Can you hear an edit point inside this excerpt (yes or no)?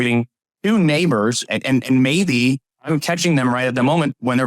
yes